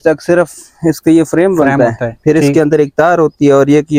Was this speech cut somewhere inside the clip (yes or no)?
no